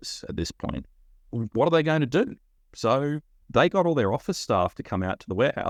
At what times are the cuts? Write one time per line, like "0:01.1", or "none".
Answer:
none